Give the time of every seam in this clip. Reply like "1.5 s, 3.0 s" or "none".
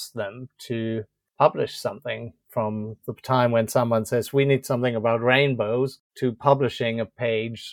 1.2 s, 6.0 s